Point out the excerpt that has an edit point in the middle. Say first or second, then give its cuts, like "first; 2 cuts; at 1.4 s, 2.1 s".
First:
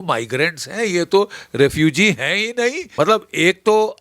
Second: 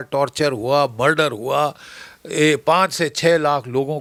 first; 1 cut; at 2.8 s